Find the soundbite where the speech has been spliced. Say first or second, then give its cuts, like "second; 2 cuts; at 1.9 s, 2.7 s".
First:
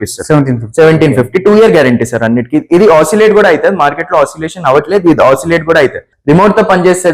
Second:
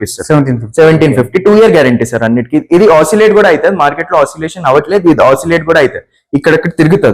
first; 1 cut; at 6.1 s